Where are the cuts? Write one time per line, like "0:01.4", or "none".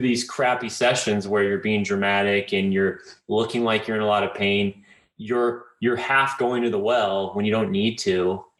none